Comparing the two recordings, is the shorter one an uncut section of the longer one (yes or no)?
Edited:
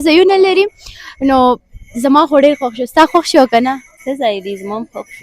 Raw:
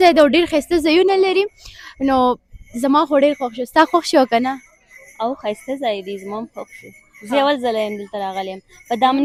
no